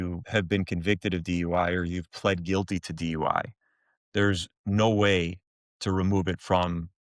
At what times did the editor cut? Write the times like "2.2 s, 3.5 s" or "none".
none

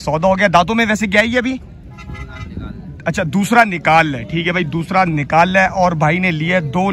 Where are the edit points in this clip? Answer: none

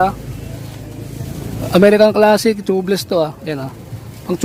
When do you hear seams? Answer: none

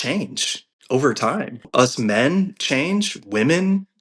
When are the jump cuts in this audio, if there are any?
1.7 s

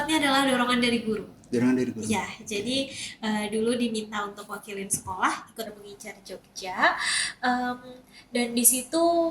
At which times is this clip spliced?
5.8 s

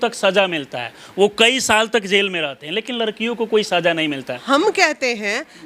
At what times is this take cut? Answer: 4.4 s

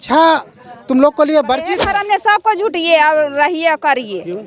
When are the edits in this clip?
1.9 s

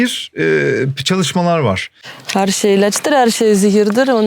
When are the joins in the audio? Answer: 1.9 s

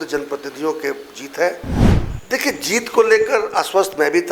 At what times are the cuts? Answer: 1.9 s

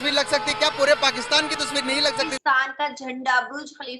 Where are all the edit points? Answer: 2.3 s

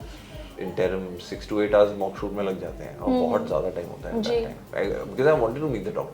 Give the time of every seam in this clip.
none

